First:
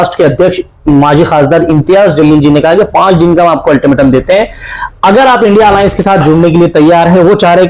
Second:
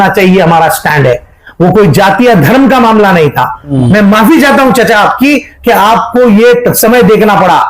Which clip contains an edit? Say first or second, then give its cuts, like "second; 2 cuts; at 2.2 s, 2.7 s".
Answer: second; 1 cut; at 3.7 s